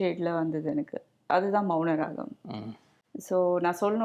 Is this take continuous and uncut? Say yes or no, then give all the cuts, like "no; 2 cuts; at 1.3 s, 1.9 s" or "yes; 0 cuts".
yes; 0 cuts